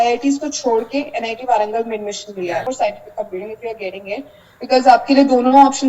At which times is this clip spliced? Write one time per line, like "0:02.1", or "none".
0:02.6